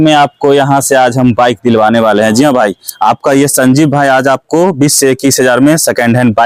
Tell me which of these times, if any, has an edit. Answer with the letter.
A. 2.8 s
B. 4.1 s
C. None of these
C